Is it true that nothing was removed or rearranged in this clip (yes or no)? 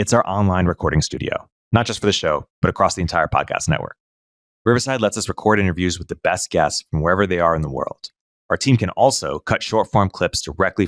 yes